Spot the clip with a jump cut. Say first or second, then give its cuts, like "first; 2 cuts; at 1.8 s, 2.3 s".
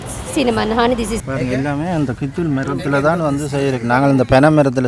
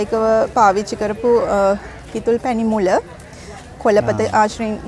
first; 1 cut; at 1.2 s